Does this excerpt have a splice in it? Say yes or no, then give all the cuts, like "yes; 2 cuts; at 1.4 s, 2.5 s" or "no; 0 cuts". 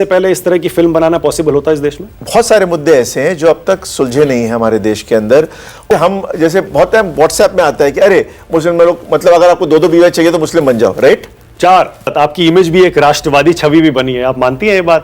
yes; 3 cuts; at 2.1 s, 5.9 s, 12.1 s